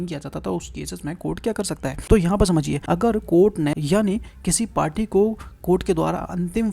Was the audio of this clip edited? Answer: yes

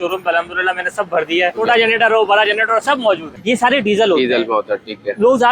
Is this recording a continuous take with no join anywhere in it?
no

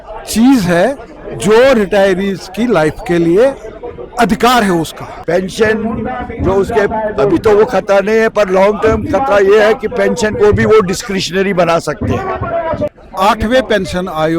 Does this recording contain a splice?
yes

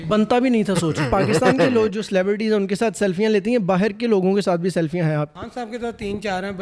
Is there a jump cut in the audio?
yes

